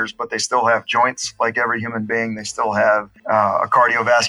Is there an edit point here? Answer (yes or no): yes